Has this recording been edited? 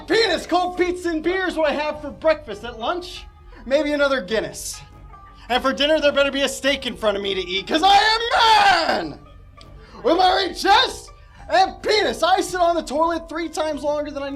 no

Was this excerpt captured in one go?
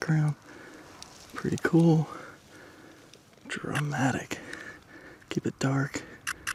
yes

